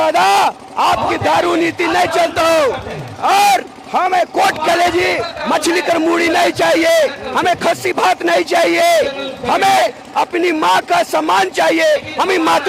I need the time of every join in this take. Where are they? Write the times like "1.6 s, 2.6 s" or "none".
none